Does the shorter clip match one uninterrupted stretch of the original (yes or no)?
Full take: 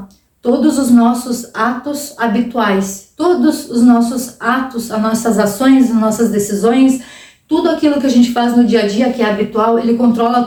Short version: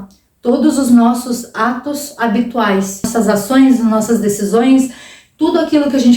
no